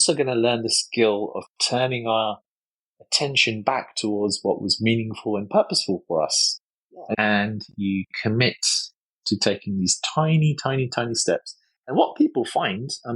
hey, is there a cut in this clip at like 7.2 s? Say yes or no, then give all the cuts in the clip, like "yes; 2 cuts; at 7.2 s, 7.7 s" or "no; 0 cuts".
yes; 1 cut; at 7.2 s